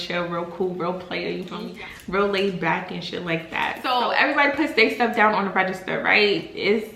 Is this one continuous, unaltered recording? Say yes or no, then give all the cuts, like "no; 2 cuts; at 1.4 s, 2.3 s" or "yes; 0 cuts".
yes; 0 cuts